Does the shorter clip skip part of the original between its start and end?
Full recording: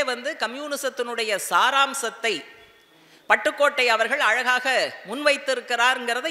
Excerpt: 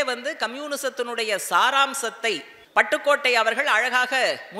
yes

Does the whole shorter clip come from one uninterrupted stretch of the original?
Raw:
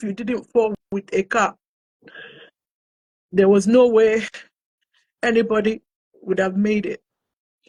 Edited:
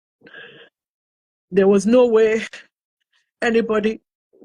yes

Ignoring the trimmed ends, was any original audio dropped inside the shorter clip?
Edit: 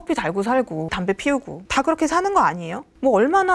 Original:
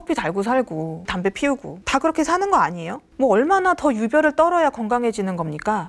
yes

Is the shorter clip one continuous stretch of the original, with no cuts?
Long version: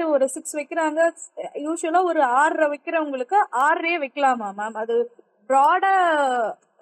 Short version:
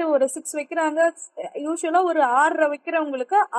yes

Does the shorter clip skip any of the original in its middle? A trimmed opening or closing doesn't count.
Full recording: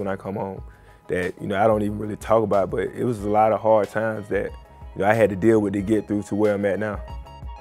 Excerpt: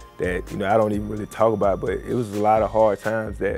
no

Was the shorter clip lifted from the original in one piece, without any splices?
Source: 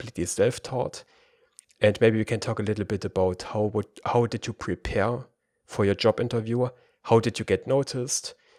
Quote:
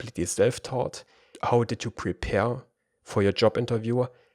no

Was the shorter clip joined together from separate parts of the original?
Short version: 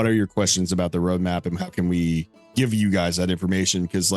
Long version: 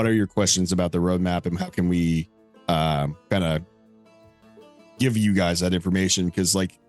yes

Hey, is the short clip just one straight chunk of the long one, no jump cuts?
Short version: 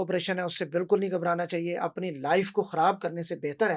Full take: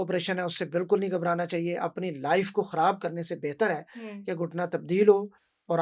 yes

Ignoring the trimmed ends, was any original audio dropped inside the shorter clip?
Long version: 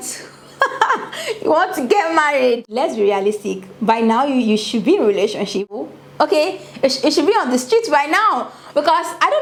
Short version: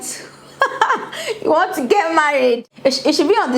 yes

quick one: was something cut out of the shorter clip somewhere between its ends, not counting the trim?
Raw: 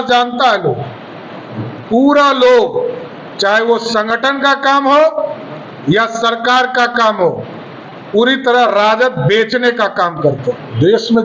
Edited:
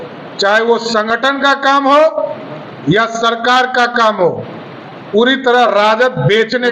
no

